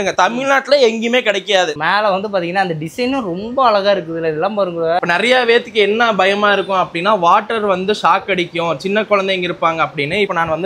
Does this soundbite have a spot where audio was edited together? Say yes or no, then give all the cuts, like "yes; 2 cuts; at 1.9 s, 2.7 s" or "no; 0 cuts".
yes; 1 cut; at 5.0 s